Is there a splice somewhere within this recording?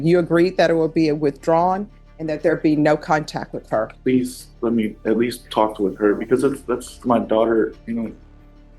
yes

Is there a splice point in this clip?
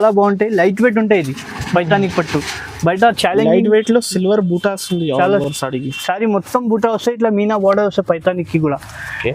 no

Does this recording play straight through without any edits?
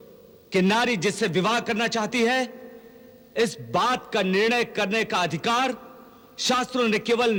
yes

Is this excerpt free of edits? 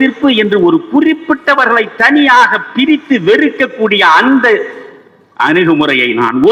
yes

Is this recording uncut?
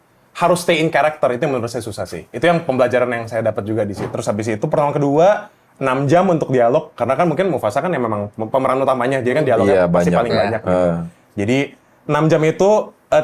no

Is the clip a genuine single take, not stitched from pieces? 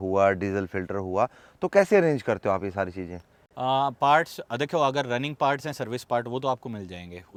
yes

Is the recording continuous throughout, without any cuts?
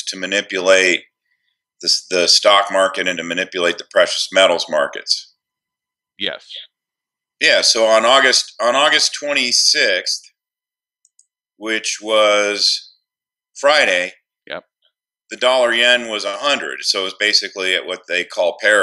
no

